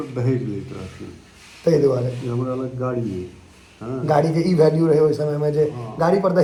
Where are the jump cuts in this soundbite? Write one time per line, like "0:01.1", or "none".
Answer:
none